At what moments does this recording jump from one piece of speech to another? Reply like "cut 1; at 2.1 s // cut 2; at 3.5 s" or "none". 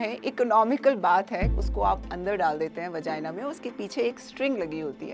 cut 1; at 1.5 s